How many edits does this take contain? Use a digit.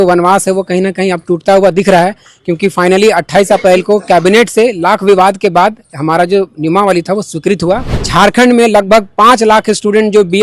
1